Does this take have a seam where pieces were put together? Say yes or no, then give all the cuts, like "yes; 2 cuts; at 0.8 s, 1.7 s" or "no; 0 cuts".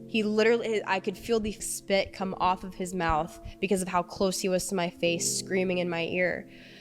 yes; 1 cut; at 1.6 s